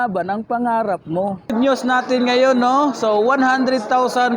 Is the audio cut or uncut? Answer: cut